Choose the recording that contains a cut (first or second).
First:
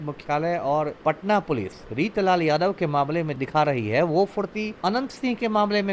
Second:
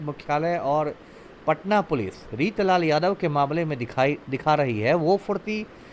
first